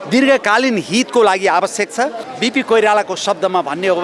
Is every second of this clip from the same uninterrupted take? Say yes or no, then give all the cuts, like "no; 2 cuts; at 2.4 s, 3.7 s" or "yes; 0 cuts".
no; 1 cut; at 2.2 s